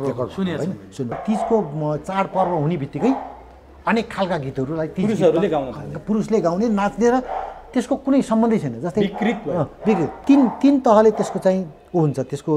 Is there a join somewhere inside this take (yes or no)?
yes